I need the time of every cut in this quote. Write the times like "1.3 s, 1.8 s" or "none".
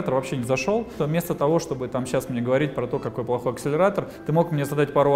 0.9 s

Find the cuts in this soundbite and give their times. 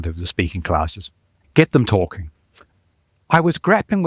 1.3 s, 2.6 s

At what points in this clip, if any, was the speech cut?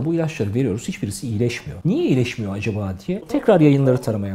1.7 s, 3.2 s

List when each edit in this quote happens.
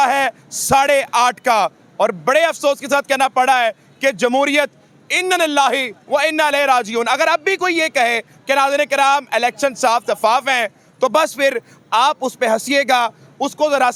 none

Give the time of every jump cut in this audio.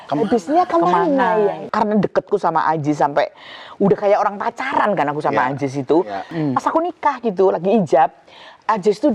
1.6 s, 6.3 s

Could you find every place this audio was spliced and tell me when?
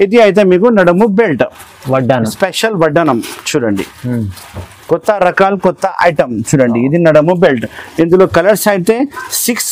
none

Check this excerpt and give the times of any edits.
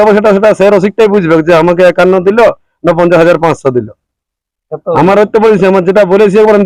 none

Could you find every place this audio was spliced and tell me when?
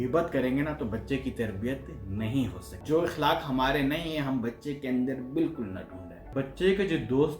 2.7 s, 6.3 s

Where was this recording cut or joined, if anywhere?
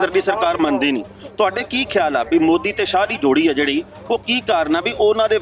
none

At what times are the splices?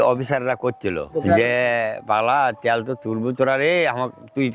1.0 s

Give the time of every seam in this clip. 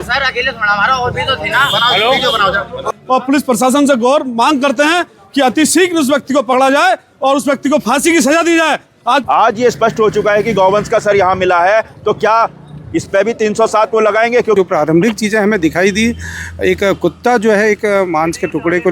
2.9 s, 9.2 s, 14.6 s

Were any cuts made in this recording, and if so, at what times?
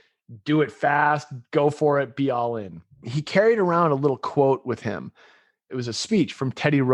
3.1 s, 5.7 s

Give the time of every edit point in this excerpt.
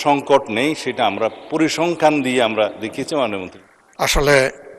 3.5 s

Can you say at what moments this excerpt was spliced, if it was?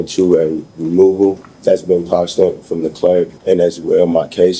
1.5 s, 3.4 s

